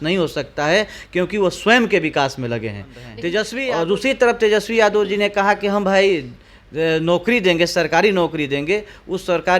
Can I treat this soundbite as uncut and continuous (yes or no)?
no